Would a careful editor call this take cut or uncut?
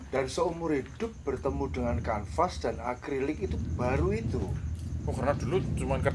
uncut